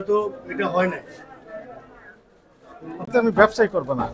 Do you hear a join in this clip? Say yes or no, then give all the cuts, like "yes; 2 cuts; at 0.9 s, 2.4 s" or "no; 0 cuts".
yes; 1 cut; at 3.1 s